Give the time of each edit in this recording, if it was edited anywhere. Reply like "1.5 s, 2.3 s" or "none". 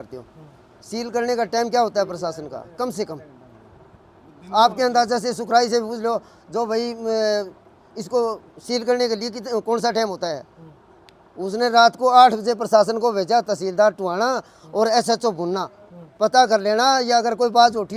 none